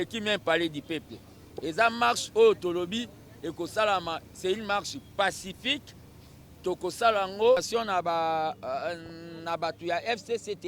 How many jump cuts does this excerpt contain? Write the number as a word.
one